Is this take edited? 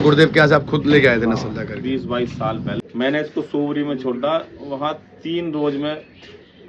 yes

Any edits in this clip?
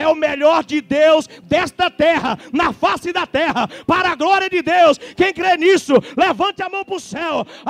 no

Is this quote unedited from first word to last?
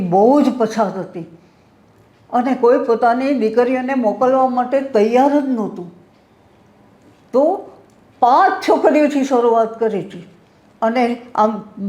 yes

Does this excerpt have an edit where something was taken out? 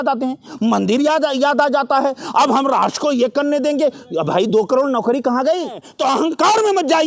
yes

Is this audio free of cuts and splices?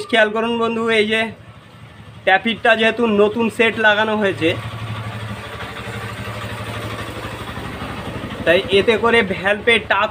yes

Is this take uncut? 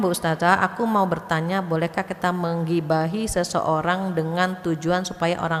yes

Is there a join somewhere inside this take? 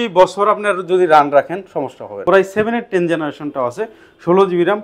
yes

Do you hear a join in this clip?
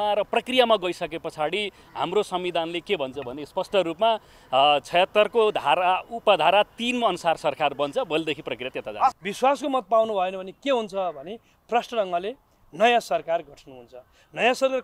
yes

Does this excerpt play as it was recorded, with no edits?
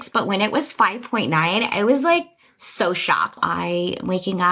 no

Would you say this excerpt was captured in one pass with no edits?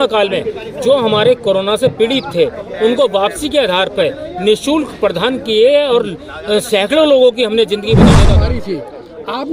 no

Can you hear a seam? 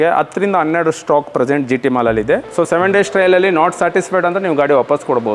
yes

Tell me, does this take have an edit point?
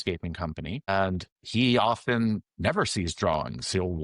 yes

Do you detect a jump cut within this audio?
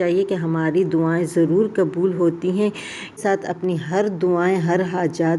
yes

